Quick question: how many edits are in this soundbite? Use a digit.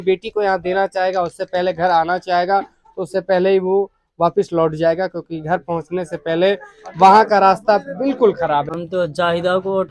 1